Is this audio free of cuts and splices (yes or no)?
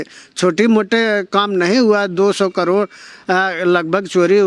yes